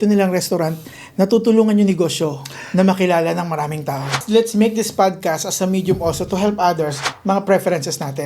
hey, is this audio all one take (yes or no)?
no